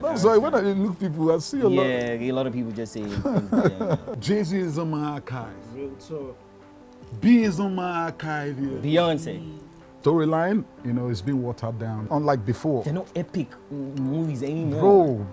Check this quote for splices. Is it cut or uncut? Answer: cut